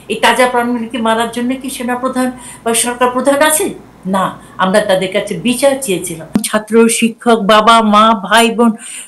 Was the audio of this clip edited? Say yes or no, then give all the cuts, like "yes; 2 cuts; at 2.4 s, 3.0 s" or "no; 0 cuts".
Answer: yes; 1 cut; at 6.4 s